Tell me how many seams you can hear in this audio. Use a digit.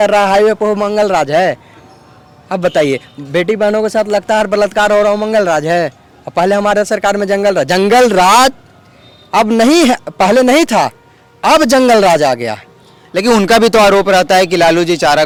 0